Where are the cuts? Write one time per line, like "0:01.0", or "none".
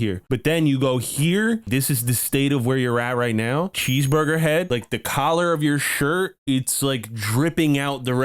0:01.6